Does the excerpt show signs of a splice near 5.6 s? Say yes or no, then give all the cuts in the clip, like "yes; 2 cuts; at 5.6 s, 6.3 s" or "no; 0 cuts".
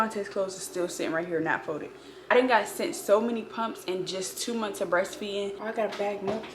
yes; 2 cuts; at 2.3 s, 5.6 s